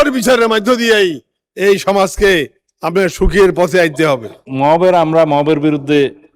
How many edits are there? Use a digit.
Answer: 1